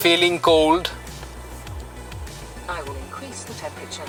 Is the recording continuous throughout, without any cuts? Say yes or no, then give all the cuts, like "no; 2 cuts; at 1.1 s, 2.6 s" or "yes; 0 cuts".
yes; 0 cuts